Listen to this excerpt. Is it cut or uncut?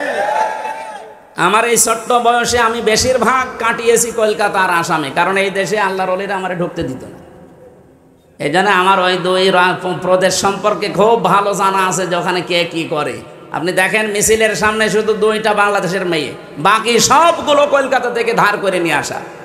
uncut